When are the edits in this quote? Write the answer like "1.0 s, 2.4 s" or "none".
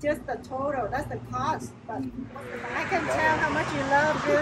2.5 s